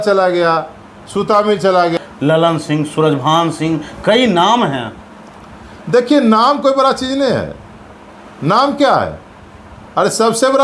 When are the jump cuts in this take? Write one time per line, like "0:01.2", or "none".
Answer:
0:02.0